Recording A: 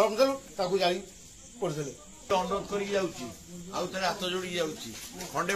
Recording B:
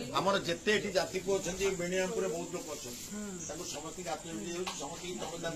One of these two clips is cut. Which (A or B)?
A